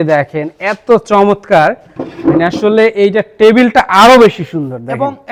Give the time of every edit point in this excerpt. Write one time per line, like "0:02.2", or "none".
none

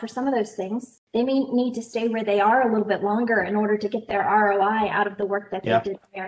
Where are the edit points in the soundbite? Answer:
0:01.0

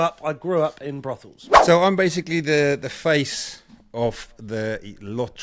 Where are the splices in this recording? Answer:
0:01.4

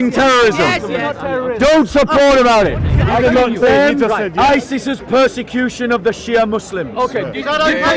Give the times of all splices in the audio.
0:02.9

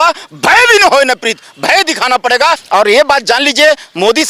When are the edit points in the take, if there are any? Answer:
0:02.6

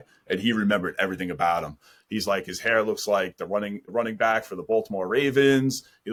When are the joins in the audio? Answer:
none

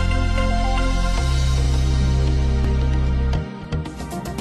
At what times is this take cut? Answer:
none

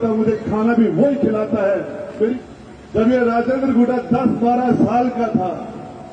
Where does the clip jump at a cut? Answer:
0:02.4

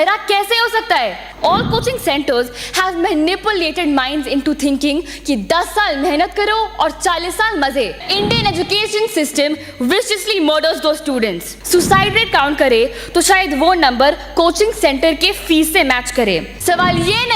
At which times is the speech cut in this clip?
0:01.2
0:08.1
0:11.5
0:16.5

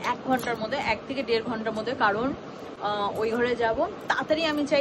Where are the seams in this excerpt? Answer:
none

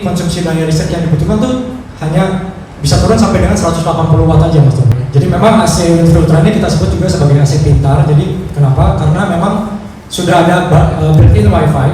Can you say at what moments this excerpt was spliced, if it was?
0:05.0

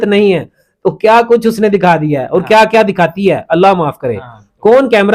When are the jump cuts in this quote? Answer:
none

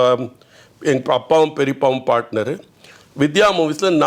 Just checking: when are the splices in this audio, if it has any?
none

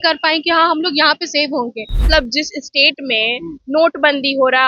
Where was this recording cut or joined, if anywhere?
0:02.1

